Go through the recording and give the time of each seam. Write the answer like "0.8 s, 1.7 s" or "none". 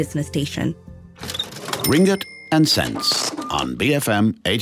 0.9 s

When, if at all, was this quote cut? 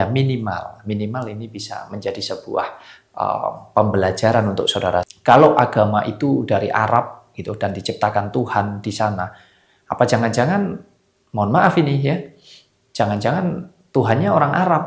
5.1 s

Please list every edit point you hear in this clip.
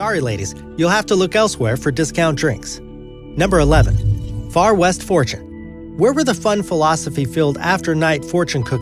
6.8 s

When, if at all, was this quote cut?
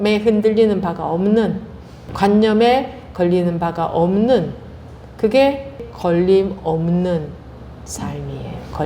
2.1 s, 5.9 s

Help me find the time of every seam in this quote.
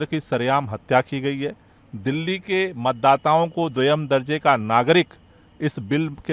none

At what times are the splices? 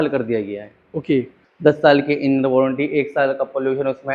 1.4 s

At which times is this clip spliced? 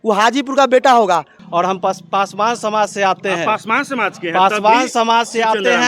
1.4 s

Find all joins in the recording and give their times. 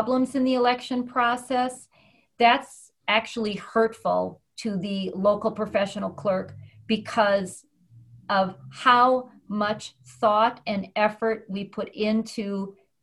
none

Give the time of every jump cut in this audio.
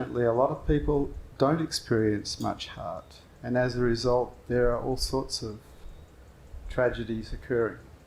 1.2 s

